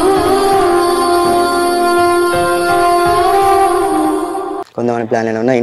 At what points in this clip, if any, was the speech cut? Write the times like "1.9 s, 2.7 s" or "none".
4.6 s